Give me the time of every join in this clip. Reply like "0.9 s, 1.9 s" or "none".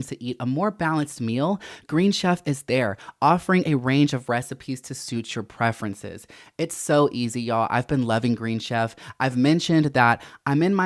none